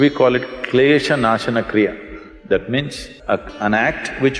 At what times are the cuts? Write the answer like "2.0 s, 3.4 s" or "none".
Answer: 3.1 s